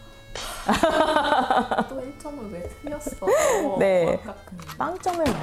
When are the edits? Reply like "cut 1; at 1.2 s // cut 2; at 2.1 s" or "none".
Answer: cut 1; at 4.4 s